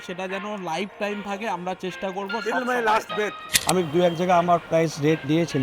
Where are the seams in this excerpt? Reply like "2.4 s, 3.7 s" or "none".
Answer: 3.5 s